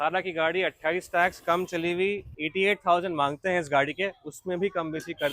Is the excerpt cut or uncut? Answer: cut